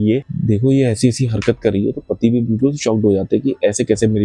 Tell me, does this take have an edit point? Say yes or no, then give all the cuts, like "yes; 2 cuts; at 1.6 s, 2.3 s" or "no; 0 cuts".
no; 0 cuts